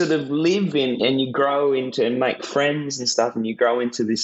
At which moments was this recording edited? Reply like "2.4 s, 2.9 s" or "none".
1.0 s